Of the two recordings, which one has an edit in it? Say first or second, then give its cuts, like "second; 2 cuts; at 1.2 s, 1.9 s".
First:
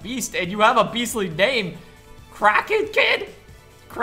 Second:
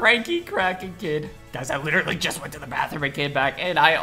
second; 1 cut; at 1.4 s